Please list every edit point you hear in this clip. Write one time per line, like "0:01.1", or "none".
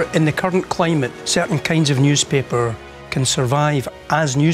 0:01.2